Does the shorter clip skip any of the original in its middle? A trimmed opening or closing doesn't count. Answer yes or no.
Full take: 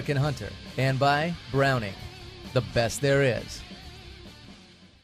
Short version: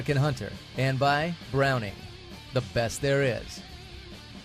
yes